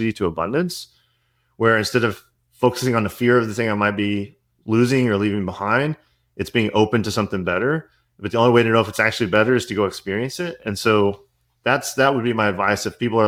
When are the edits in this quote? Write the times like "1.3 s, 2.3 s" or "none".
none

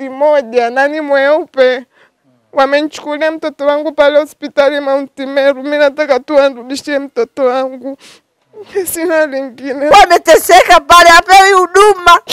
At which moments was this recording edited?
9.9 s

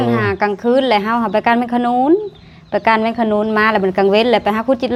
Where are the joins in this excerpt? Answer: none

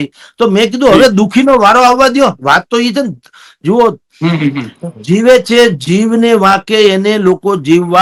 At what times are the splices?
none

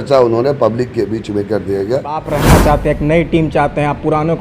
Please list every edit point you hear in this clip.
2.3 s

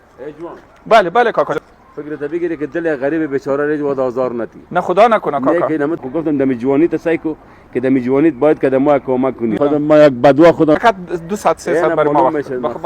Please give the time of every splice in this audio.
1.6 s, 6.0 s, 9.6 s, 10.8 s

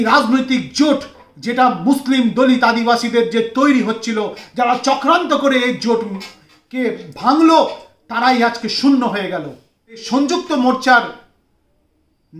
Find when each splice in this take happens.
10.0 s

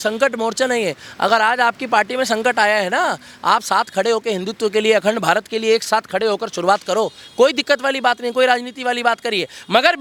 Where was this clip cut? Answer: none

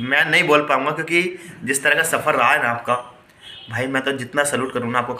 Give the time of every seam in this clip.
none

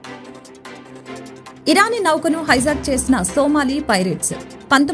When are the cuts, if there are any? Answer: 1.2 s

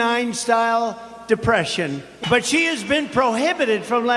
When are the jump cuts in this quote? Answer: 2.2 s

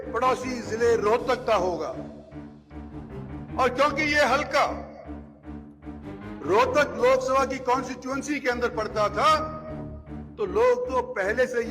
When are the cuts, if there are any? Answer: 2.0 s, 3.5 s

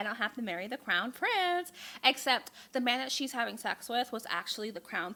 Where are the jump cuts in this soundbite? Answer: none

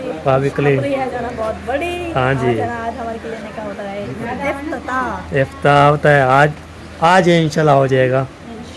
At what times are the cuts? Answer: none

